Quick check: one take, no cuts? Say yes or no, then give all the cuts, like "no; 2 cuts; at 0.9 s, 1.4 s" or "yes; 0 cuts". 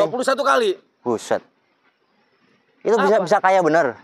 yes; 0 cuts